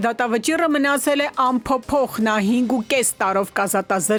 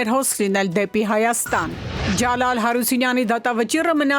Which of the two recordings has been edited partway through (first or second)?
second